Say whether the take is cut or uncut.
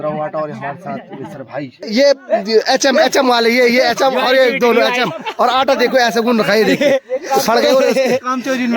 cut